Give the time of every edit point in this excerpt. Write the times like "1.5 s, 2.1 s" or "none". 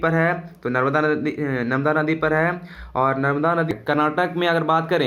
3.7 s